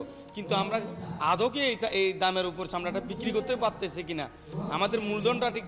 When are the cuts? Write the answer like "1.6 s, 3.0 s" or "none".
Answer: none